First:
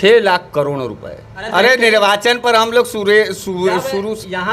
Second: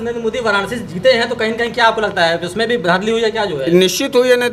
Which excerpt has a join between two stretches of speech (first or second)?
first